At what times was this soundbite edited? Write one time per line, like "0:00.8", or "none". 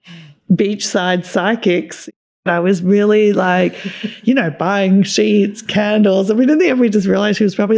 0:02.3